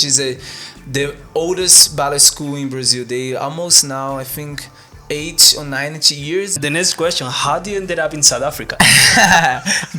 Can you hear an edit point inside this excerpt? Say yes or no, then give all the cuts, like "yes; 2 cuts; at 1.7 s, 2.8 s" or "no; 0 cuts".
yes; 1 cut; at 6.6 s